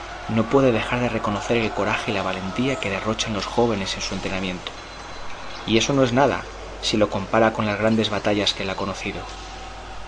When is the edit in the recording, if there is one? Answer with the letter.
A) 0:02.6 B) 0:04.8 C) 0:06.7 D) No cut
A